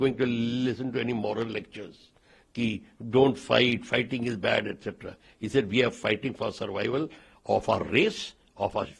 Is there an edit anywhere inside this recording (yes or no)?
no